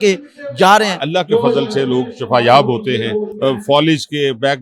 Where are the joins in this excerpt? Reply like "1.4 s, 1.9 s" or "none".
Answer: 1.0 s, 3.3 s

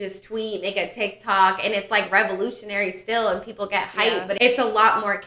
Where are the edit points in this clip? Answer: 4.4 s

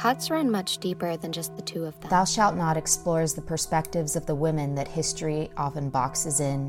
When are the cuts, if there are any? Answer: 2.0 s

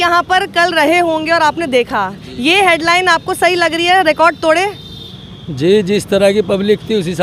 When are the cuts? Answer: none

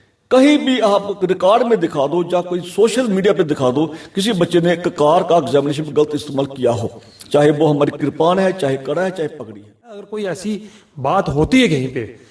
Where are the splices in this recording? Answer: 10.0 s

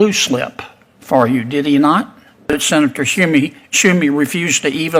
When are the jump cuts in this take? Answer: 2.5 s

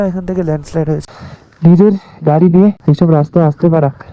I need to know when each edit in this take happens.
1.0 s, 2.8 s

